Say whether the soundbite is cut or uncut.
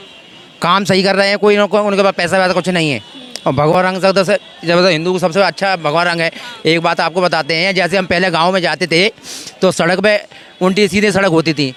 uncut